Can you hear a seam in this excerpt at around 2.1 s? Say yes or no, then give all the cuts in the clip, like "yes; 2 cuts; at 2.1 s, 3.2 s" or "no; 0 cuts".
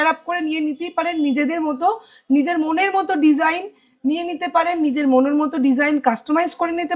no; 0 cuts